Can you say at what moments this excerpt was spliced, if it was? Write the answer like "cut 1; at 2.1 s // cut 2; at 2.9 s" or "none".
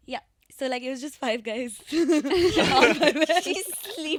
none

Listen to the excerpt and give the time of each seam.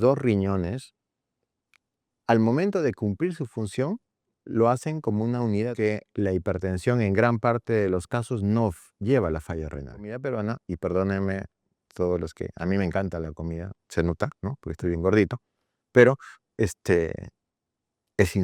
cut 1; at 5.7 s // cut 2; at 10.2 s

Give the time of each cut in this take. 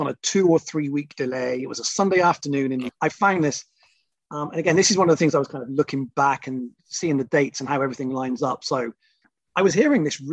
cut 1; at 2.9 s // cut 2; at 9.3 s

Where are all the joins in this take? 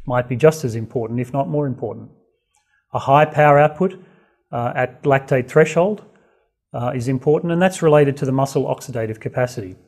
cut 1; at 5.8 s

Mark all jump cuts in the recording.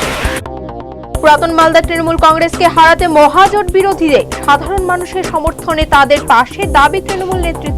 cut 1; at 1.2 s

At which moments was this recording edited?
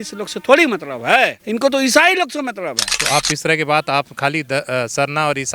cut 1; at 1.4 s // cut 2; at 2.9 s

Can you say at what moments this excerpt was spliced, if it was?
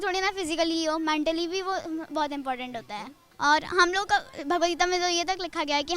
cut 1; at 3.2 s

